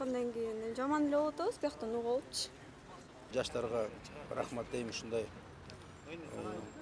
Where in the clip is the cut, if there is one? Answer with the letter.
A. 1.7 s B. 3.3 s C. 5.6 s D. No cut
B